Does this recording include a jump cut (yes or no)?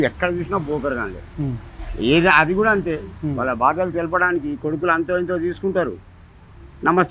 no